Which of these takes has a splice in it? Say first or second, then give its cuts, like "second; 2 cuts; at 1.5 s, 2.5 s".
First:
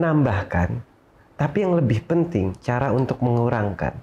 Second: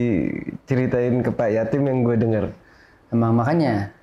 second; 1 cut; at 2.5 s